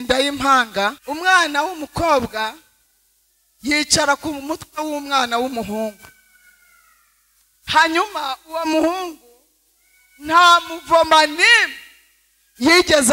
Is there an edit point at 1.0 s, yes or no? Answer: yes